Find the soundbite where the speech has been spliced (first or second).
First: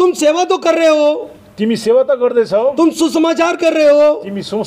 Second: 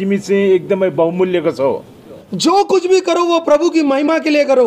second